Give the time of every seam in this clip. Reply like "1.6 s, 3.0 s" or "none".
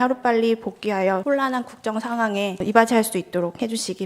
1.2 s, 2.6 s